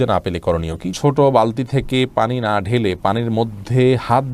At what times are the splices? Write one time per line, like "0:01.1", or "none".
0:00.9